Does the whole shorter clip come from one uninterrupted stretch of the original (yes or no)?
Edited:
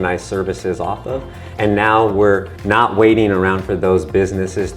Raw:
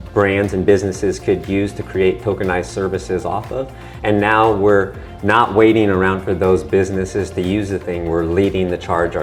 no